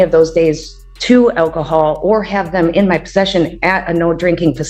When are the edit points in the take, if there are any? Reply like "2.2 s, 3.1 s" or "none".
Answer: none